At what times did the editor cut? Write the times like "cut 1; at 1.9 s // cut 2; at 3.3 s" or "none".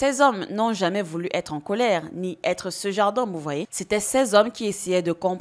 cut 1; at 3.7 s